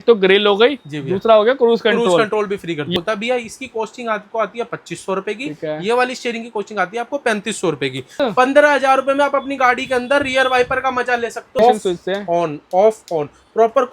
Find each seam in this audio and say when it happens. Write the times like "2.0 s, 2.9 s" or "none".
2.9 s, 8.1 s, 11.6 s

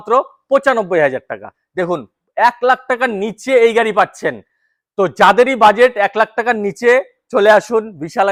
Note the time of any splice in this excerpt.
none

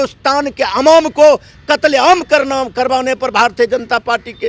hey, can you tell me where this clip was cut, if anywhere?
none

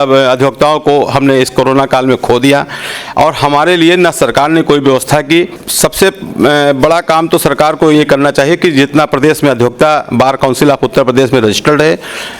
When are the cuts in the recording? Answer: 5.6 s

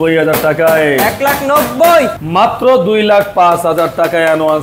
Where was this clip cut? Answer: 2.2 s

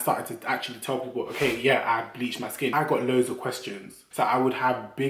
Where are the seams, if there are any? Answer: 2.7 s, 4.0 s

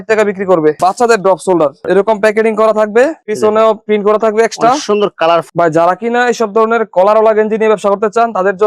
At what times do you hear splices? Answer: 0.8 s, 5.5 s

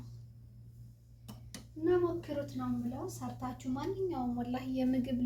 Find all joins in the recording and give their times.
none

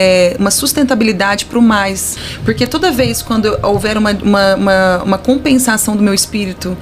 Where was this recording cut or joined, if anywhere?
2.1 s

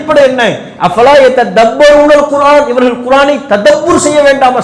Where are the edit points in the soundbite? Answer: none

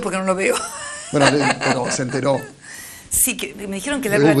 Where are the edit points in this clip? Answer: none

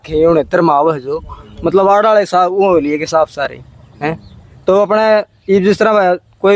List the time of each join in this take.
none

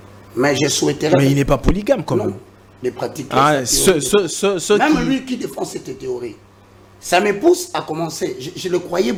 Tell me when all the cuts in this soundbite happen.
none

